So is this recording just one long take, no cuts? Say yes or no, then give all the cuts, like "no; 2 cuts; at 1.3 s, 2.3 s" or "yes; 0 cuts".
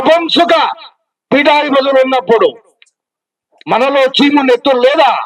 yes; 0 cuts